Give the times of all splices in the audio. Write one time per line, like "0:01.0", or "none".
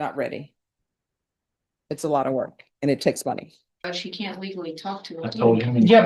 0:03.8